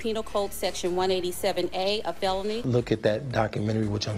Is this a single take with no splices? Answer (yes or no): no